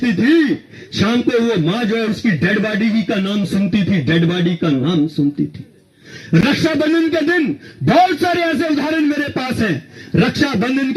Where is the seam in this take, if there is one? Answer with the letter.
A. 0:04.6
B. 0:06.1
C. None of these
C